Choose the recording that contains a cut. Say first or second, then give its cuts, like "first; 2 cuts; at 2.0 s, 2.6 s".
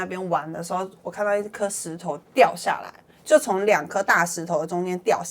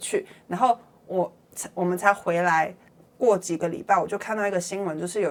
first; 1 cut; at 2.2 s